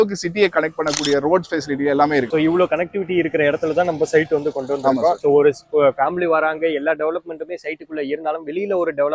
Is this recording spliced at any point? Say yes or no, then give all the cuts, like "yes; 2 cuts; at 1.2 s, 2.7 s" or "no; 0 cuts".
no; 0 cuts